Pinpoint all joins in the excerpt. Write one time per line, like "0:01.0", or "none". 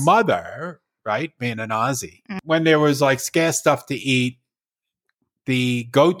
0:02.3